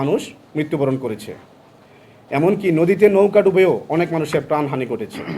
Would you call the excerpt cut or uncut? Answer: uncut